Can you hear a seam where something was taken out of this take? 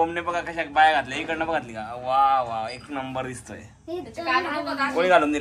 no; 0 cuts

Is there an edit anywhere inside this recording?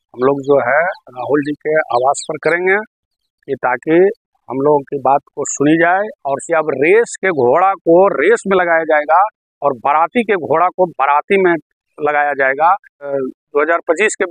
yes; 2 cuts; at 6.3 s, 13.1 s

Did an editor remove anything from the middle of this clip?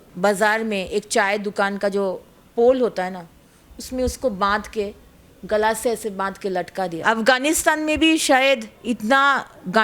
yes; 1 cut; at 7.0 s

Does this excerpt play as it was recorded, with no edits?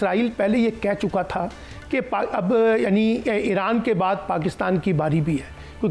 yes; 0 cuts

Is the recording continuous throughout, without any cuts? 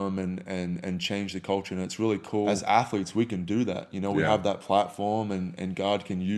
no; 1 cut; at 2.5 s

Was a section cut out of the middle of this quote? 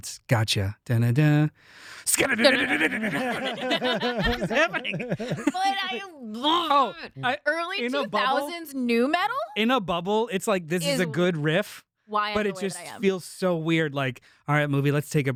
no; 0 cuts

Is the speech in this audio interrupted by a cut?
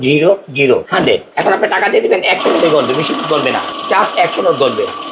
yes; 2 cuts; at 1.1 s, 3.7 s

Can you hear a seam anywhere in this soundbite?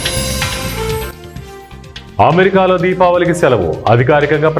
yes; 1 cut; at 1.1 s

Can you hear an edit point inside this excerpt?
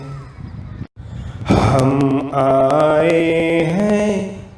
no; 0 cuts

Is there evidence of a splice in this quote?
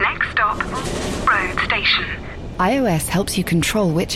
no; 0 cuts

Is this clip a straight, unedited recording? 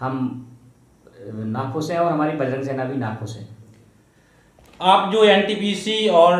yes; 0 cuts

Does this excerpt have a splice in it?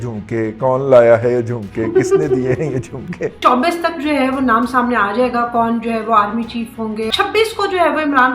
yes; 2 cuts; at 3.4 s, 7.1 s

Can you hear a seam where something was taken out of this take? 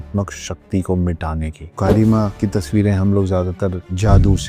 yes; 2 cuts; at 1.6 s, 2.3 s

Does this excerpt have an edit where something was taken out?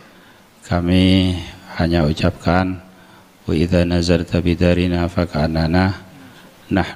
no; 0 cuts

